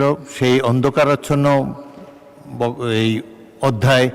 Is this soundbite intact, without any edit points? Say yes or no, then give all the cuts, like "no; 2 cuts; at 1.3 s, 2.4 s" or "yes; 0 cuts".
yes; 0 cuts